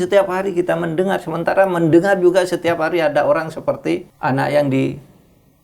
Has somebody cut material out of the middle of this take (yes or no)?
yes